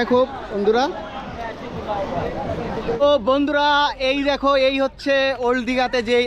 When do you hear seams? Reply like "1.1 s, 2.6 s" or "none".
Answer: 3.0 s